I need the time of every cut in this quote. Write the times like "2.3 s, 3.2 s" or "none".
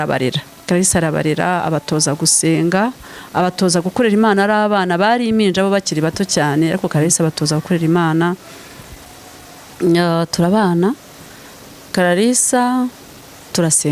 none